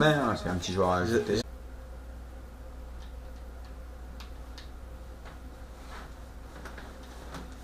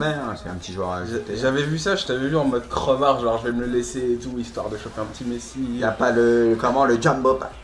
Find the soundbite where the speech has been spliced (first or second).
second